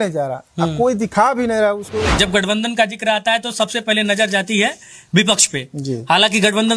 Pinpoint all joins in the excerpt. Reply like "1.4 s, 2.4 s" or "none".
2.1 s